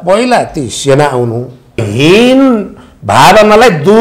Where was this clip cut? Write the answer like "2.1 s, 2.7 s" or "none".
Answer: 1.9 s